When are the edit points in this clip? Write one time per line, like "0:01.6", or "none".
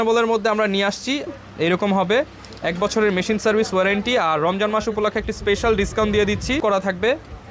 0:01.3
0:06.6